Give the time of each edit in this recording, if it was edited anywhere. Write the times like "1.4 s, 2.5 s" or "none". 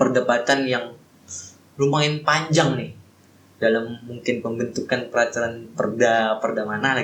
none